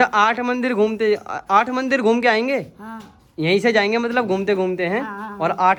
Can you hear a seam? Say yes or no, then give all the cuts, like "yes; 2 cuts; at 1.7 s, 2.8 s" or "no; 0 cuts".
no; 0 cuts